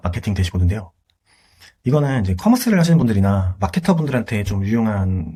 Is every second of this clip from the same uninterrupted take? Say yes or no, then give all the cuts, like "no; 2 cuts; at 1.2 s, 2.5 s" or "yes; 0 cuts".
yes; 0 cuts